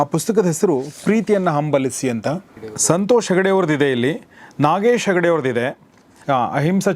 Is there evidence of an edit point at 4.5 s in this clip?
no; 1 cut; at 2.8 s

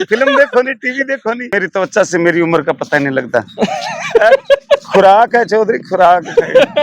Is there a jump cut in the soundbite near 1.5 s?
yes; 1 cut; at 1.5 s

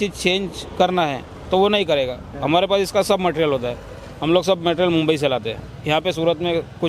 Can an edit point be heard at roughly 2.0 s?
no; 0 cuts

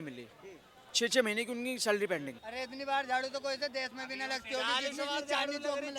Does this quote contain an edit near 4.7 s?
no; 1 cut; at 2.4 s

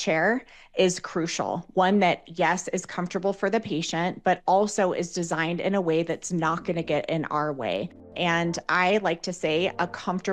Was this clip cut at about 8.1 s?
yes; 1 cut; at 8.1 s

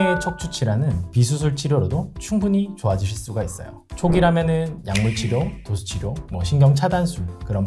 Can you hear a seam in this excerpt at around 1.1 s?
yes; 1 cut; at 1.1 s

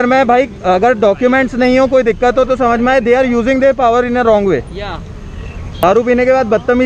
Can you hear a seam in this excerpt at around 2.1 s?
no; 1 cut; at 5.8 s

